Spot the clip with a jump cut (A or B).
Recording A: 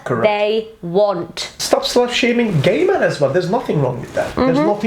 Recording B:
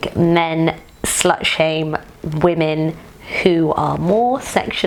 A